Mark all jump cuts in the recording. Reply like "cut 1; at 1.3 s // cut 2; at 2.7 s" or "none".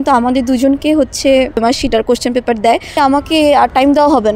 cut 1; at 1.6 s // cut 2; at 2.9 s